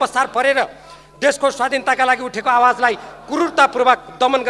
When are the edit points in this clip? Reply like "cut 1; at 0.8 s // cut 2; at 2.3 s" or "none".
none